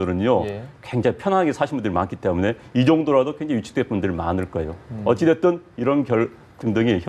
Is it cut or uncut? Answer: uncut